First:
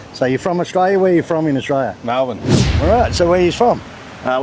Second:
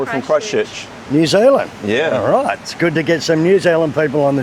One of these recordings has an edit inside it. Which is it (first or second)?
first